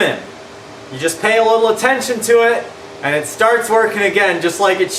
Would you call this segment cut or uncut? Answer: uncut